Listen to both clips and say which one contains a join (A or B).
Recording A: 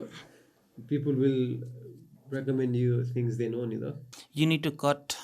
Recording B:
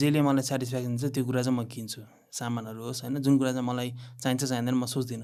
A